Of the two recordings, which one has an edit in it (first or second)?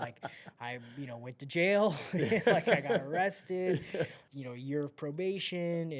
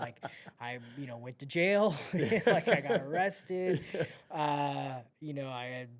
first